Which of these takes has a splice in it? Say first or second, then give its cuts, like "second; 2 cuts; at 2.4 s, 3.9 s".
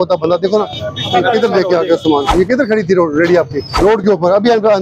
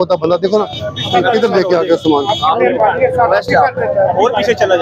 first; 2 cuts; at 2.3 s, 3.7 s